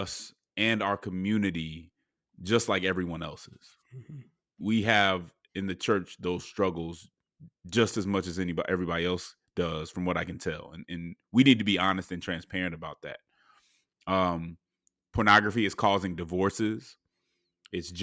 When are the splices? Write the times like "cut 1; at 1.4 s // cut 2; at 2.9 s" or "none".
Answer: cut 1; at 4.6 s